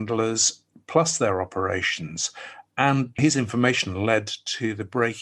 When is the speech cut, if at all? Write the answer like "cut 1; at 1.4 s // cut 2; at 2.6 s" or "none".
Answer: cut 1; at 3.2 s